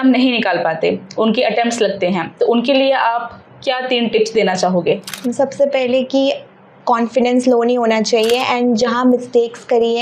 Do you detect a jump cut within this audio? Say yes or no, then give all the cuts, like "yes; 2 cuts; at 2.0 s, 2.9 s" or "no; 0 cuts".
no; 0 cuts